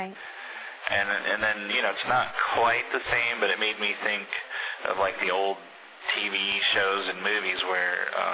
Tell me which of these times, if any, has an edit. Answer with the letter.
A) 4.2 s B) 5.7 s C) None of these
B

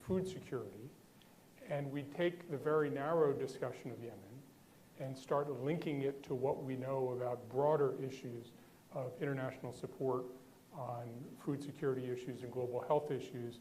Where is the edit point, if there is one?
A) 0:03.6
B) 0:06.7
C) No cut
B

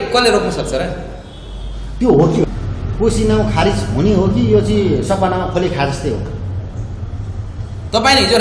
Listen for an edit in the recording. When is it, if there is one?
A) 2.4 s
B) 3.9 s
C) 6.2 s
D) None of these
A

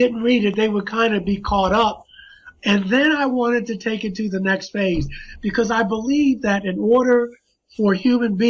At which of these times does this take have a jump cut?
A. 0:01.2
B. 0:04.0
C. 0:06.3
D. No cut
D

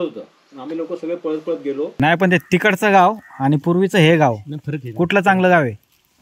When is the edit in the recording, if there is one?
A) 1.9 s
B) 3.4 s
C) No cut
A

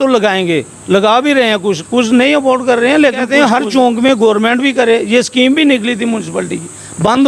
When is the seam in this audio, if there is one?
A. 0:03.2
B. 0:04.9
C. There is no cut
A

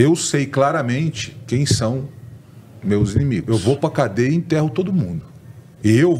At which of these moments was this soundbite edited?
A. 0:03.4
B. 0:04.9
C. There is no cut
A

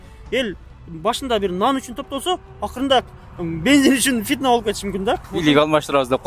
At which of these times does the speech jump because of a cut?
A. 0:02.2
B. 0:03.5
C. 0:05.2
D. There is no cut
D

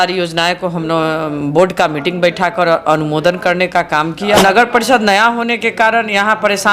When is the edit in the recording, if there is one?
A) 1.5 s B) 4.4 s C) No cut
B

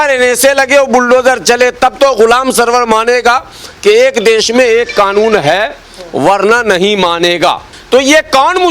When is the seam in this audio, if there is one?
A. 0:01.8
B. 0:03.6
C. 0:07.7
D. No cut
C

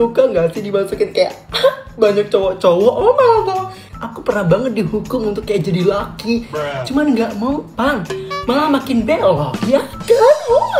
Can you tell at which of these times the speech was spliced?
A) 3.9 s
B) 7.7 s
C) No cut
A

